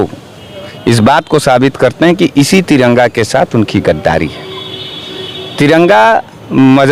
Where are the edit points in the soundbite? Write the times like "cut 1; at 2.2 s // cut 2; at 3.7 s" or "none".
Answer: none